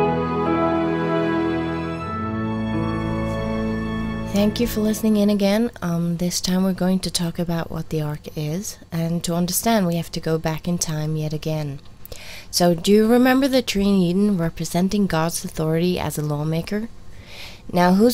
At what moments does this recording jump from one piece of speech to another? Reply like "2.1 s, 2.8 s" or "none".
none